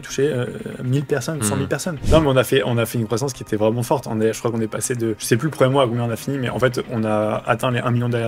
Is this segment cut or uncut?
cut